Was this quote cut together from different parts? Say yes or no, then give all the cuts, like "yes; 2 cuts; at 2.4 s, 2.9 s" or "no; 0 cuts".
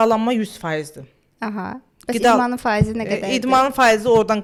no; 0 cuts